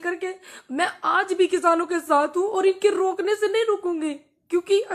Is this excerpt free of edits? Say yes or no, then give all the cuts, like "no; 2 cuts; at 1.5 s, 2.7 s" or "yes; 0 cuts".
yes; 0 cuts